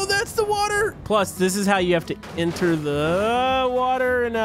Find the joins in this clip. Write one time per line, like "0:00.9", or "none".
0:01.0